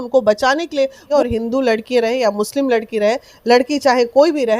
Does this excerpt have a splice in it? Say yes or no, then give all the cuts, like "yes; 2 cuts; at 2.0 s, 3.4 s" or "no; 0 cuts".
yes; 1 cut; at 1.0 s